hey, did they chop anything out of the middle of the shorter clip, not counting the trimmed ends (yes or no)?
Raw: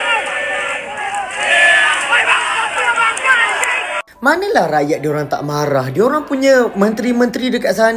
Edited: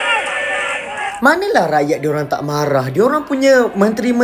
yes